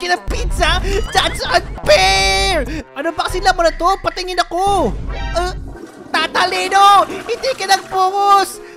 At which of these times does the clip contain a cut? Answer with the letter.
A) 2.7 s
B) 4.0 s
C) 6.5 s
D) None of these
A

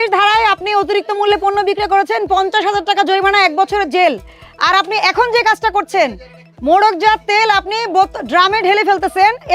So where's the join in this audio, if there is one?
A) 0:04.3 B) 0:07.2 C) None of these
C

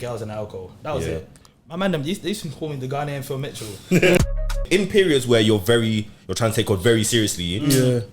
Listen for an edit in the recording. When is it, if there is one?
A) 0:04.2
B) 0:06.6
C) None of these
A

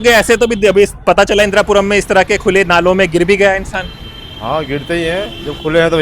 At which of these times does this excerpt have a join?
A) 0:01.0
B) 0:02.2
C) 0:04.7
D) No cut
D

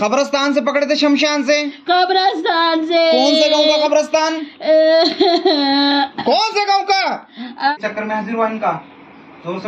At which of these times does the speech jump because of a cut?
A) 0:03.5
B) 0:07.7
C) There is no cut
B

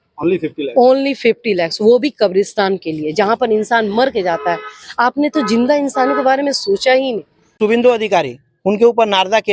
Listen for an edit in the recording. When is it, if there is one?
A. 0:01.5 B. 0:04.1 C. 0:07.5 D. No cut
C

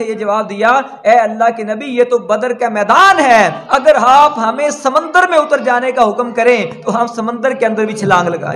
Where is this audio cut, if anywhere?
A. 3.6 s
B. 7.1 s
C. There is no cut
A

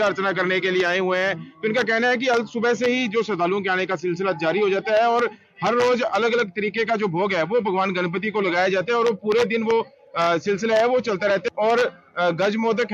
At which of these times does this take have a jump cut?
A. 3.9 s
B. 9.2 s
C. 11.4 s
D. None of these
C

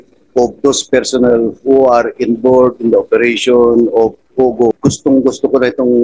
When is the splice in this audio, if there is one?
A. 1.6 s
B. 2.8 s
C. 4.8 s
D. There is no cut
C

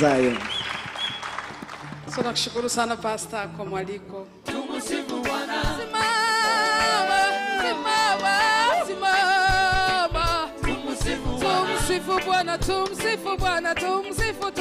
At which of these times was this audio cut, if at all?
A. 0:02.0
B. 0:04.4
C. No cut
B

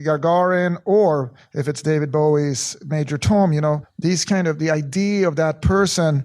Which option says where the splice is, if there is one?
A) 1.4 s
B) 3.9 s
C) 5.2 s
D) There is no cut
B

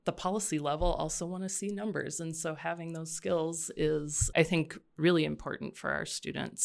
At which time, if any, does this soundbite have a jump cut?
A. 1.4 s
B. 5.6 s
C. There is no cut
C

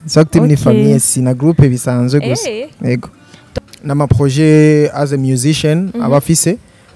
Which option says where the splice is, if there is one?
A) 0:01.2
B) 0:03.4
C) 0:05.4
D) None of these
B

